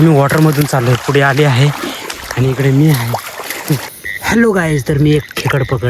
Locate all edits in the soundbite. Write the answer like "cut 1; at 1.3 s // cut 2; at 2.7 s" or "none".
cut 1; at 3.9 s